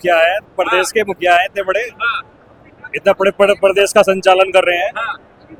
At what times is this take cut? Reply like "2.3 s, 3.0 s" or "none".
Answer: none